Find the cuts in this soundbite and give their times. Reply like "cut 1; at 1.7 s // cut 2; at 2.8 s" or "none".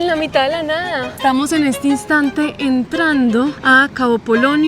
cut 1; at 1.1 s // cut 2; at 3.6 s

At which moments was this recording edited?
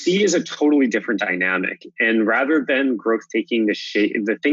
none

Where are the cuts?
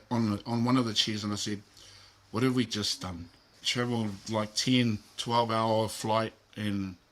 cut 1; at 3.5 s

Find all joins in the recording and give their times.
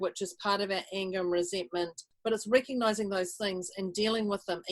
cut 1; at 2.0 s

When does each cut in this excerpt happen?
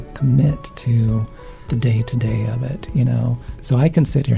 cut 1; at 1.6 s // cut 2; at 3.5 s

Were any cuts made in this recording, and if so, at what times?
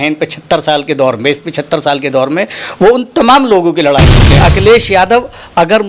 cut 1; at 4.2 s

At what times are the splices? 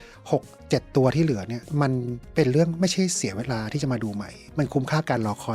cut 1; at 4.4 s

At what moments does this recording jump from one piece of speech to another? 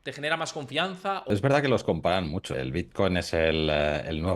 cut 1; at 1.3 s // cut 2; at 2.5 s

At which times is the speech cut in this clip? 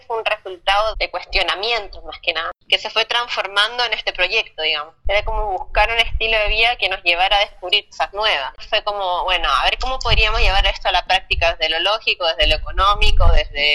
cut 1; at 0.9 s // cut 2; at 2.5 s // cut 3; at 5.0 s // cut 4; at 8.6 s

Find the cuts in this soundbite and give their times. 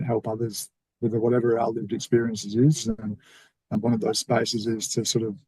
cut 1; at 3.7 s

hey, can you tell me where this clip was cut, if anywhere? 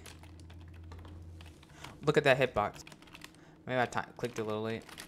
cut 1; at 2.9 s

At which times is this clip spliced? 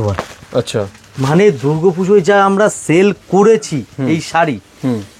none

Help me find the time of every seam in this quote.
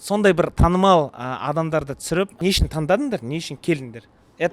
cut 1; at 2.3 s

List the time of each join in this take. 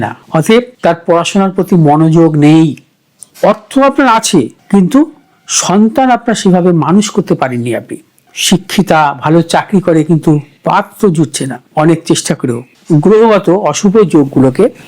cut 1; at 3.3 s // cut 2; at 8.2 s // cut 3; at 12.7 s

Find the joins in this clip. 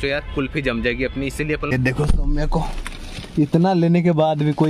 cut 1; at 1.7 s

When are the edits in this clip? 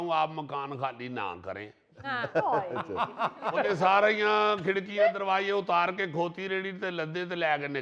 cut 1; at 3.5 s

